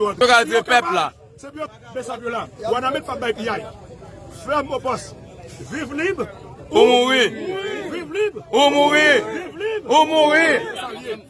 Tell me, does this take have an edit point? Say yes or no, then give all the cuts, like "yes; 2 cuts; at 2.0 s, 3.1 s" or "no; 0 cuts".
yes; 1 cut; at 1.7 s